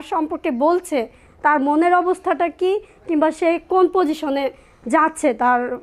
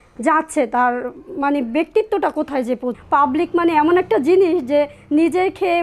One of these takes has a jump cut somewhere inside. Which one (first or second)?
second